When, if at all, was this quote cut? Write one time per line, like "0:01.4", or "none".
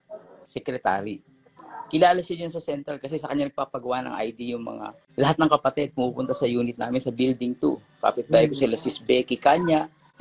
0:04.9